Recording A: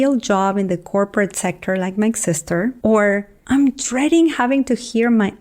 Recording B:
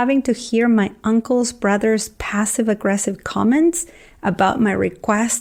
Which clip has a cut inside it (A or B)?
A